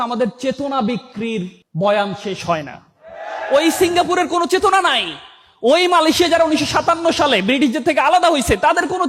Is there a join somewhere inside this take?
no; 0 cuts

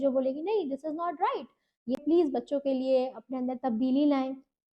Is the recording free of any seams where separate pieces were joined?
no; 1 cut; at 2.0 s

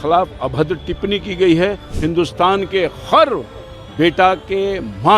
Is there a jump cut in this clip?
yes; 1 cut; at 1.9 s

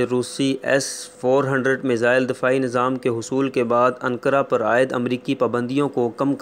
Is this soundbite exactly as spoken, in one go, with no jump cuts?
yes; 0 cuts

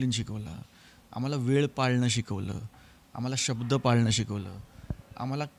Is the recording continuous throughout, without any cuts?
yes; 0 cuts

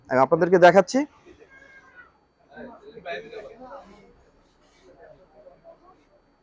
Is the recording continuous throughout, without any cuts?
yes; 0 cuts

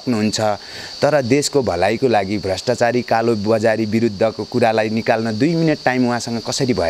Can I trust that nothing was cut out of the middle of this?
yes; 0 cuts

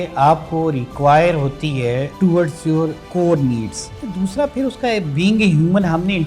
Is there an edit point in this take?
yes; 3 cuts; at 2.1 s, 3.0 s, 4.1 s

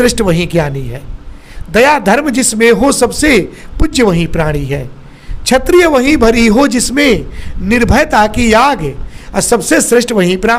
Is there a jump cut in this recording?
no; 0 cuts

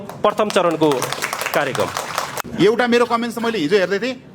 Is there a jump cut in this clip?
yes; 1 cut; at 2.4 s

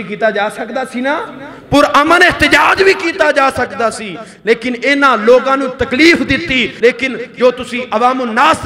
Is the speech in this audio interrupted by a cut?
yes; 1 cut; at 6.7 s

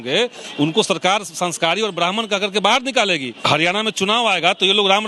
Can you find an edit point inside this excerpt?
yes; 1 cut; at 3.4 s

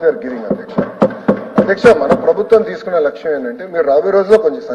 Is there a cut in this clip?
no; 0 cuts

